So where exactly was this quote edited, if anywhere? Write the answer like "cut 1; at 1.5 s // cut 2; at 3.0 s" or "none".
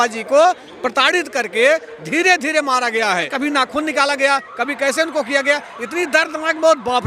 cut 1; at 3.3 s